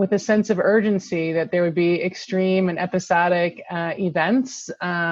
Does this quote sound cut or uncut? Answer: uncut